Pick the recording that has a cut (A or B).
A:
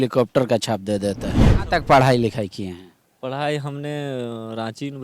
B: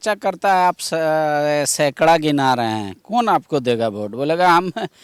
A